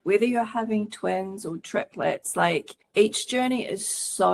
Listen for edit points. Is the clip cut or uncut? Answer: cut